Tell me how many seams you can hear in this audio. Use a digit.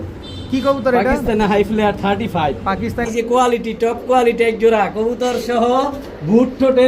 1